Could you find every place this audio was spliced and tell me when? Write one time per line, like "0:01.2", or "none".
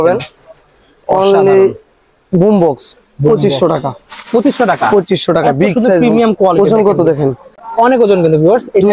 none